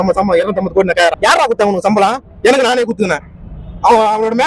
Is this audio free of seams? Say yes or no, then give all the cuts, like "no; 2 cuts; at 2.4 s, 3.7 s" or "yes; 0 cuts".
no; 1 cut; at 1.1 s